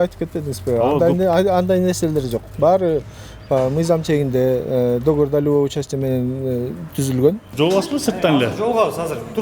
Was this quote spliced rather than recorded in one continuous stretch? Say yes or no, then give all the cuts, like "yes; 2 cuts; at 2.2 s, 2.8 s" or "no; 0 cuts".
yes; 1 cut; at 7.5 s